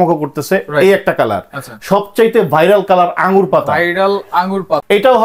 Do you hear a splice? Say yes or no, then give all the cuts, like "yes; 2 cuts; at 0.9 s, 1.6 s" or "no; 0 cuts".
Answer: no; 0 cuts